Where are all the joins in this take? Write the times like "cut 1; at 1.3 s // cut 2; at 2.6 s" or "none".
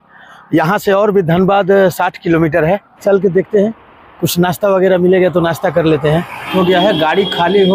cut 1; at 2.9 s // cut 2; at 6.5 s